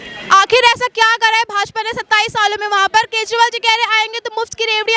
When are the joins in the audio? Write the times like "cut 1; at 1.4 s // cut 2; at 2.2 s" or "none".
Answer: none